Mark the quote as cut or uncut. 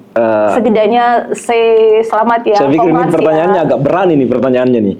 uncut